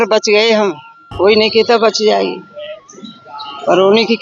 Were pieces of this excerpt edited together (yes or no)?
yes